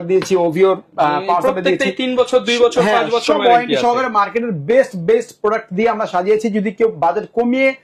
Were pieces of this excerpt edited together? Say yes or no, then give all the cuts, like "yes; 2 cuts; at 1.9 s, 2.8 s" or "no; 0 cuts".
no; 0 cuts